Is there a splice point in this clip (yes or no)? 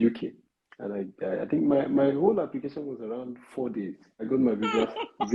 yes